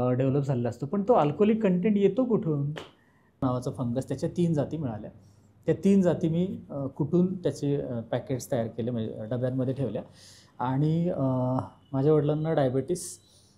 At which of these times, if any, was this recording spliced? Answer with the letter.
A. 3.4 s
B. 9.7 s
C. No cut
A